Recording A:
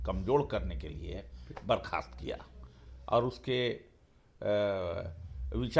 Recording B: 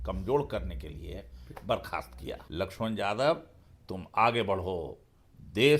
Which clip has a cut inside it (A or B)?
B